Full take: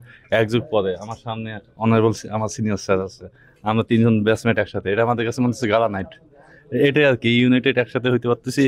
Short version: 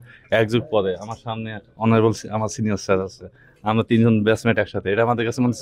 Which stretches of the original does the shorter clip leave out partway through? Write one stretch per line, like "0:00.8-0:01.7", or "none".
none